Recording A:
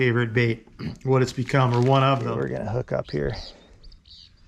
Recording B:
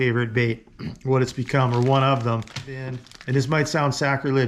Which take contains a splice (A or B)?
A